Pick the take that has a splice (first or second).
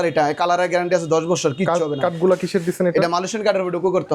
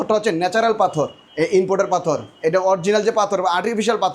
second